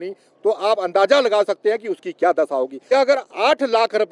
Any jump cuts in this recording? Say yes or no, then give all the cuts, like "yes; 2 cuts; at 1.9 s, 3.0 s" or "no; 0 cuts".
yes; 1 cut; at 2.8 s